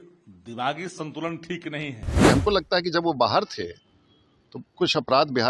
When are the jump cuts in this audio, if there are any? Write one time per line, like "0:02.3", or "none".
0:02.2